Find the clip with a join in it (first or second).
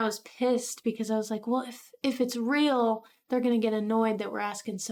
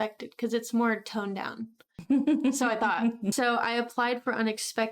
second